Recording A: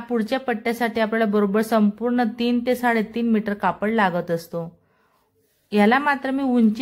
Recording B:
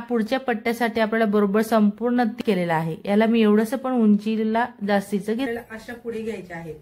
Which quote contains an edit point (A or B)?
B